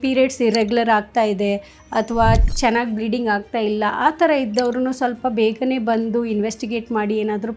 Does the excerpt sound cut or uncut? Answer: uncut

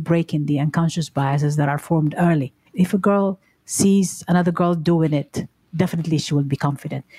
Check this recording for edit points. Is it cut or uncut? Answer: cut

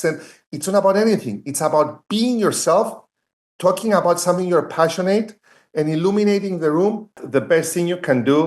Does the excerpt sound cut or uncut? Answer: cut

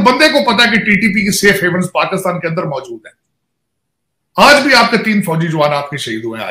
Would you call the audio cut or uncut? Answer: uncut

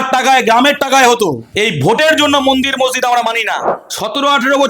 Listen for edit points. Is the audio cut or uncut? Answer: cut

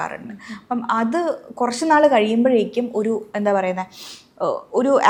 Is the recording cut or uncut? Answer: uncut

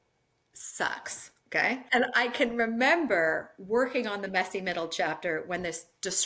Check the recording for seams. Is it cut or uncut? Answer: cut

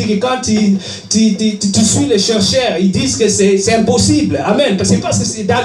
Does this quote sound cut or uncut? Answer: uncut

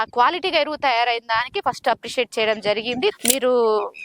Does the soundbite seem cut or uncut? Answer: cut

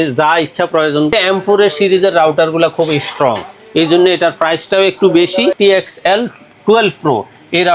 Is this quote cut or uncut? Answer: cut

